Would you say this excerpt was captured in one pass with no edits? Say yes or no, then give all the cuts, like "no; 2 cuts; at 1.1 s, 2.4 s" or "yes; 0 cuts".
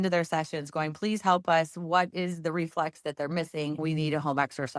no; 1 cut; at 3.8 s